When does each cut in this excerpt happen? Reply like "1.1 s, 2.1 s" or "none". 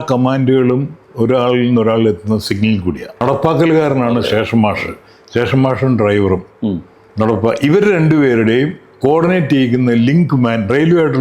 3.2 s